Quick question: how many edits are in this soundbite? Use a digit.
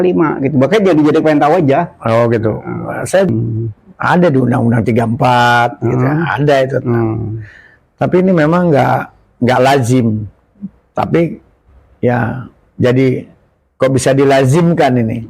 1